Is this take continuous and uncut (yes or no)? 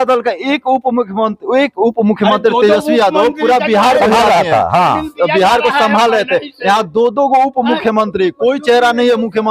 yes